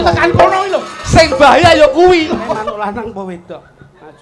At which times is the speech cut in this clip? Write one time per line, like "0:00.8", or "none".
0:02.5